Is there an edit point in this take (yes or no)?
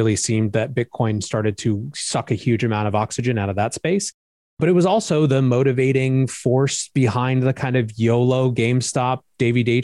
no